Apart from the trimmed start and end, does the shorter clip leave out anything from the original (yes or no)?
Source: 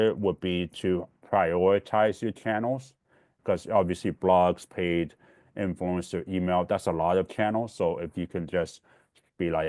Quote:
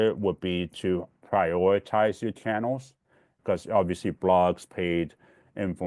no